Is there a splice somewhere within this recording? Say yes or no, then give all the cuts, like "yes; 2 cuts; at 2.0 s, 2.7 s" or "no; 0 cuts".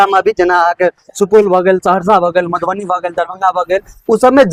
no; 0 cuts